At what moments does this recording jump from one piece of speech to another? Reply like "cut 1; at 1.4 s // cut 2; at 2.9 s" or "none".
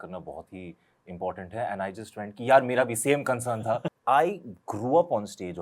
cut 1; at 3.9 s